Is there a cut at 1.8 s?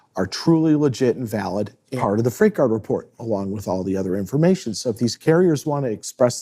yes; 1 cut; at 1.8 s

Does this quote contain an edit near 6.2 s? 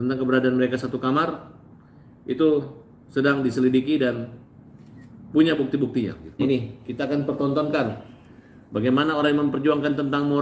yes; 1 cut; at 6.2 s

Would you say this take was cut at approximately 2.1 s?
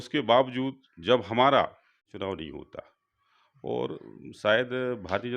yes; 1 cut; at 2.1 s

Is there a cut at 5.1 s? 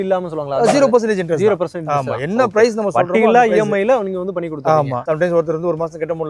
yes; 1 cut; at 5.1 s

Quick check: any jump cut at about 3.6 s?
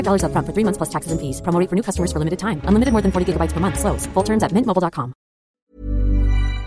no; 1 cut; at 5.5 s

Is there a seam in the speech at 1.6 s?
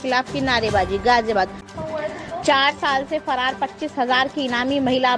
yes; 1 cut; at 1.6 s

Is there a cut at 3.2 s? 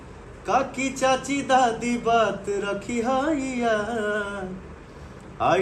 no; 0 cuts

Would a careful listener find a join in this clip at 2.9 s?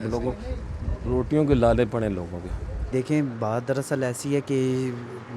yes; 1 cut; at 2.9 s

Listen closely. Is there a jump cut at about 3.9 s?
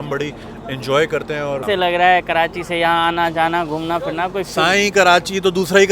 no; 1 cut; at 1.6 s

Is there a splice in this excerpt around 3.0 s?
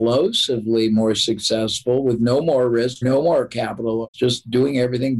yes; 2 cuts; at 3.0 s, 4.1 s

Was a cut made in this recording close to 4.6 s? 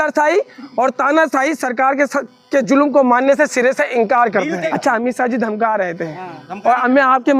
yes; 1 cut; at 4.6 s

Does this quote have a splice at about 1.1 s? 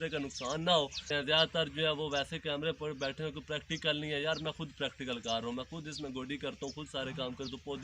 yes; 1 cut; at 1.1 s

